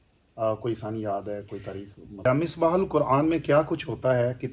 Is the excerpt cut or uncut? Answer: cut